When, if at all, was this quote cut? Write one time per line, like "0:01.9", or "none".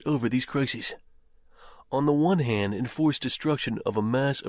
none